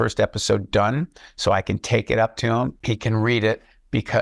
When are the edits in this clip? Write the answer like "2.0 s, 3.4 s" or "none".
2.8 s